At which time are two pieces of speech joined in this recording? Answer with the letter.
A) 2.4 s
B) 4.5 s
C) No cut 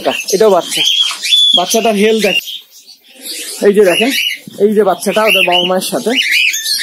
A